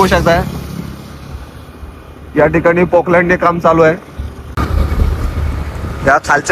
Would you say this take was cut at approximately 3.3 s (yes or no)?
no